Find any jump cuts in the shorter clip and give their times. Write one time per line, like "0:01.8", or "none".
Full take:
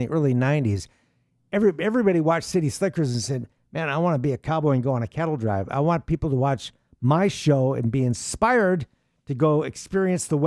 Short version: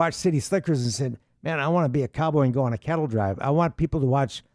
none